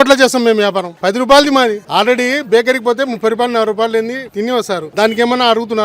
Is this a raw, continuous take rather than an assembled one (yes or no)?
no